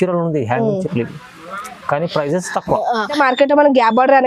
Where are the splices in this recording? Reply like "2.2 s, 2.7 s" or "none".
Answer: 3.2 s